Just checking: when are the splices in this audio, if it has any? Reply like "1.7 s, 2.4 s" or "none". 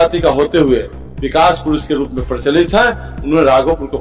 none